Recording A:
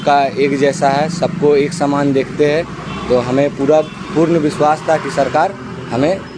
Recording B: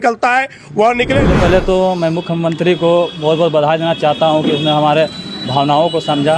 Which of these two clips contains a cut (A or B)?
B